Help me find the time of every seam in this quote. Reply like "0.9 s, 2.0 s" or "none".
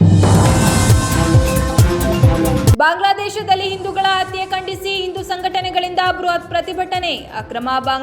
2.7 s

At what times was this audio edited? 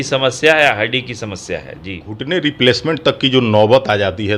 2.1 s

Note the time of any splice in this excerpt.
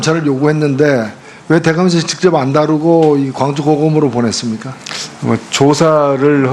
4.5 s

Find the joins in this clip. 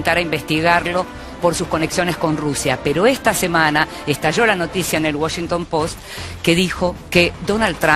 none

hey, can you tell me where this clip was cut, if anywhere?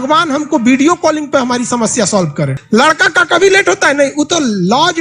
2.6 s

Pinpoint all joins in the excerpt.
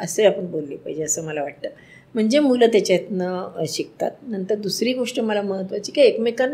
none

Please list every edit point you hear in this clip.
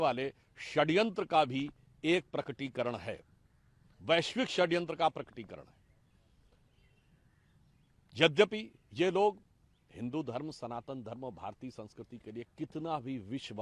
none

